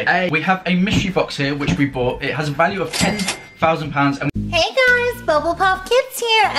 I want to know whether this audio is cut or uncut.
cut